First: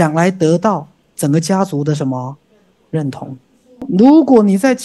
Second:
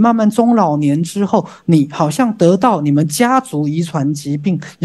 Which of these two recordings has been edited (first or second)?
first